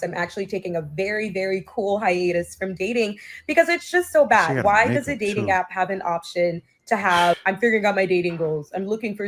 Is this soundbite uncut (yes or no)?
yes